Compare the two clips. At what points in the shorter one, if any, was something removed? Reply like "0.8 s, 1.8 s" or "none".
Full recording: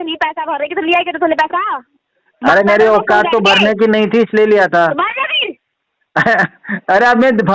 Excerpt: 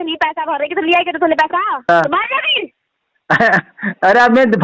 1.8 s